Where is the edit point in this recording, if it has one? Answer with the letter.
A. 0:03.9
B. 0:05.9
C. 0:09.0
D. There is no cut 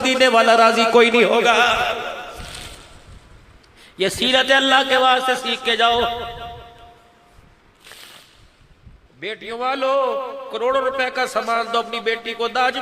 C